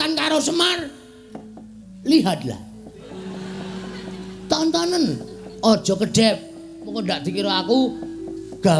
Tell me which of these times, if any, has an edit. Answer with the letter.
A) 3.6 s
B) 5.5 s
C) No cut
C